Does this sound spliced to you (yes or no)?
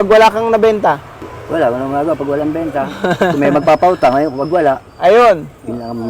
yes